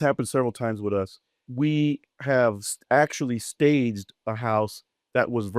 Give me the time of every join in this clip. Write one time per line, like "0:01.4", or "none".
0:01.4